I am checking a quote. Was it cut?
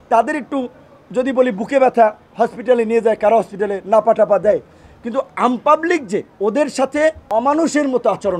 yes; 2 cuts; at 6.3 s, 7.2 s

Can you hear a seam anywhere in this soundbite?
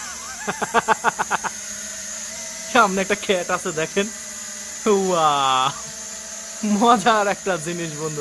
no; 0 cuts

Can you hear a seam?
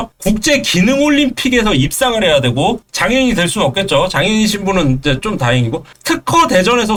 no; 0 cuts

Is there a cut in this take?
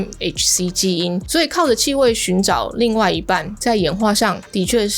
yes; 1 cut; at 1.2 s

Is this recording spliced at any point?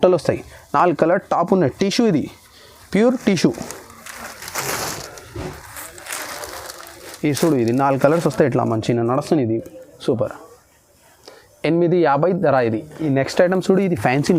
no; 0 cuts

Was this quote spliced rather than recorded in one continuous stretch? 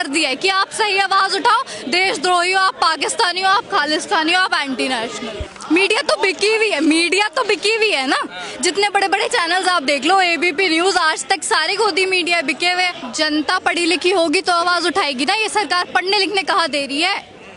yes; 2 cuts; at 5.4 s, 13.0 s

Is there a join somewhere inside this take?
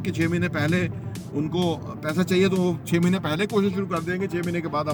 no; 0 cuts

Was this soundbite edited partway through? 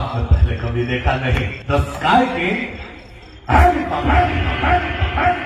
yes; 1 cut; at 1.6 s

